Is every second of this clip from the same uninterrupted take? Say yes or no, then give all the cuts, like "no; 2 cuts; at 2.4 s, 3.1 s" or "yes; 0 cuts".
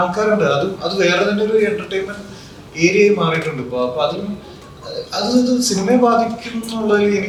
yes; 0 cuts